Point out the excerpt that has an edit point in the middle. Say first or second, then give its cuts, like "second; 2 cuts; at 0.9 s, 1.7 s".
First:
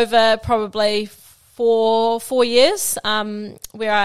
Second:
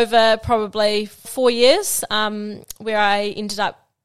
second; 1 cut; at 1.3 s